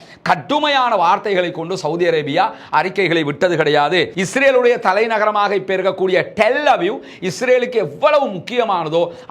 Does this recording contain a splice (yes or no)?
yes